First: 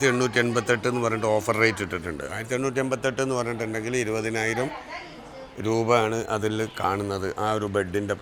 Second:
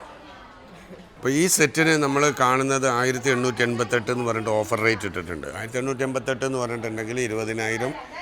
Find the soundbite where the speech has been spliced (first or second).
second